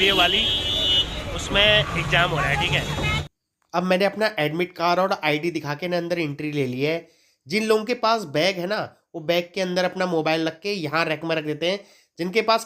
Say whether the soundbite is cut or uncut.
cut